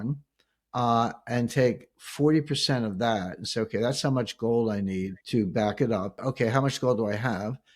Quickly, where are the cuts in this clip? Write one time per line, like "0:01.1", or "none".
0:05.2
0:06.2